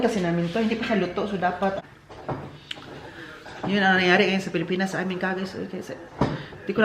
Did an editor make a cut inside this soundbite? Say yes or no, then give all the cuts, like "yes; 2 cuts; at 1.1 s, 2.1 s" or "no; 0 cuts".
yes; 1 cut; at 1.8 s